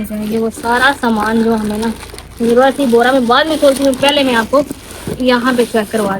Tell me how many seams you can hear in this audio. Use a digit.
0